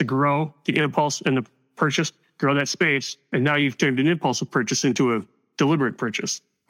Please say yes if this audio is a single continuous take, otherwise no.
no